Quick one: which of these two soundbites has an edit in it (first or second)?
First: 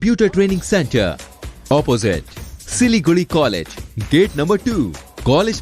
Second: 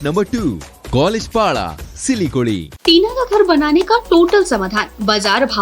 second